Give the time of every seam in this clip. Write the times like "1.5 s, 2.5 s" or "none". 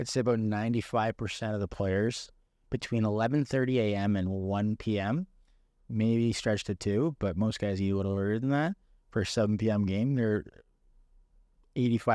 2.3 s